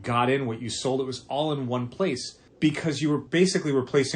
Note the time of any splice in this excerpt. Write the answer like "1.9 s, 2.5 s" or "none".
2.4 s, 3.3 s